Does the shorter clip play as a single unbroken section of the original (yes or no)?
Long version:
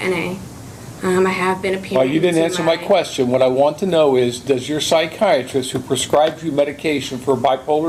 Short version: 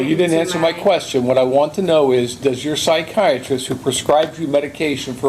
yes